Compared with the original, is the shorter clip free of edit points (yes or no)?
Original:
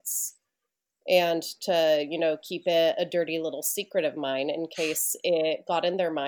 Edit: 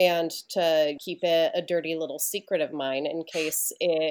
no